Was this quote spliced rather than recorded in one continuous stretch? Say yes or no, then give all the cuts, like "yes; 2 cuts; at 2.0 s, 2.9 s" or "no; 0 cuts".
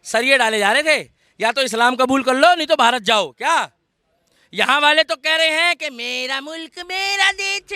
no; 0 cuts